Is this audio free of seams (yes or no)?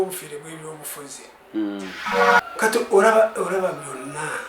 no